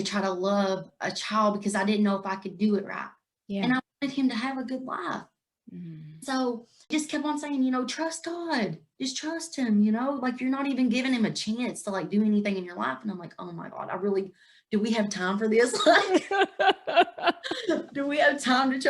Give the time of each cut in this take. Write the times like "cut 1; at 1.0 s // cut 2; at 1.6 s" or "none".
cut 1; at 6.8 s